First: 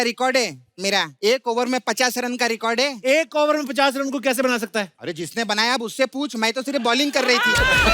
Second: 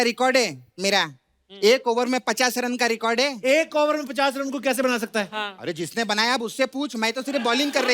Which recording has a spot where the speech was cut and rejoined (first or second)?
first